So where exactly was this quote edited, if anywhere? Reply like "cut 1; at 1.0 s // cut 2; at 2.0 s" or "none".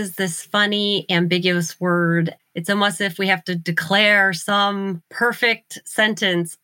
cut 1; at 2.4 s // cut 2; at 5.1 s

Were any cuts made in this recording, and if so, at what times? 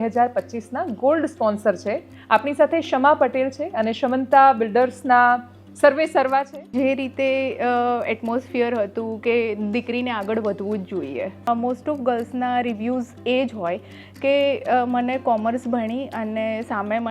cut 1; at 2.1 s // cut 2; at 6.7 s // cut 3; at 11.5 s

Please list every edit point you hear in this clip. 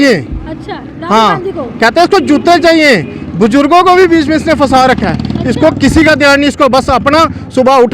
none

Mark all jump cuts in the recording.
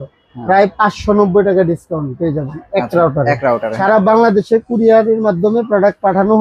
cut 1; at 3.7 s

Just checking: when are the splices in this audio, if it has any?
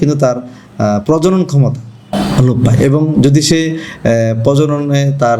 cut 1; at 2.0 s

